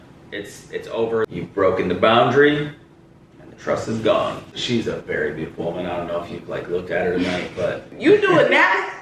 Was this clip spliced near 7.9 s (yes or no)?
yes